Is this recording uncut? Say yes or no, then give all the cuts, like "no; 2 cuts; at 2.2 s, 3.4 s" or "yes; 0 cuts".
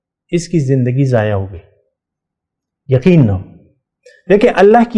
yes; 0 cuts